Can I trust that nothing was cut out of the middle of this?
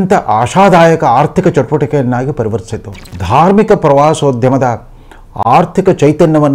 no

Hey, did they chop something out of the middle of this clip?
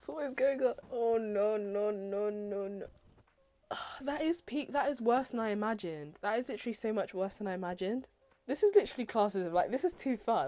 yes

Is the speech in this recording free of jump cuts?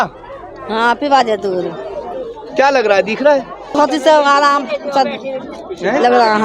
no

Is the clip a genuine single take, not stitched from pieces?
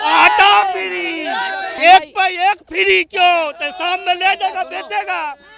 no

